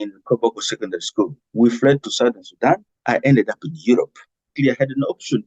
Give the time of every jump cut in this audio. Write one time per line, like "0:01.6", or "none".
0:01.4
0:02.9
0:04.5